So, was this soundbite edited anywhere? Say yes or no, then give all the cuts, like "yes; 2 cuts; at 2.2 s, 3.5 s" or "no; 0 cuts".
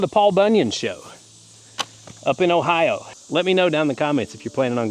yes; 1 cut; at 3.1 s